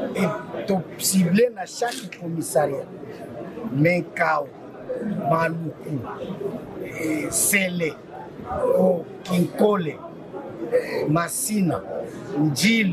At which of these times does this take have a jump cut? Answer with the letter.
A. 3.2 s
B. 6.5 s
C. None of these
C